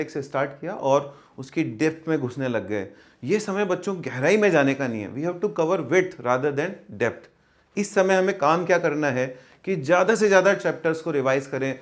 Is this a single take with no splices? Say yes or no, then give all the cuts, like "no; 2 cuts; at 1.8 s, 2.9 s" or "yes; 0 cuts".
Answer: yes; 0 cuts